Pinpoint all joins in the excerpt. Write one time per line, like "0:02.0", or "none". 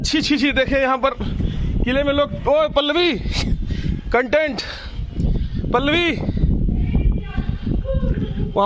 none